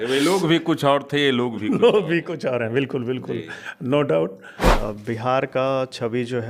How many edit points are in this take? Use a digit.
1